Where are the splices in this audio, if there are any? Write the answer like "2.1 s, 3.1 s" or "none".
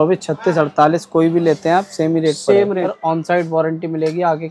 2.9 s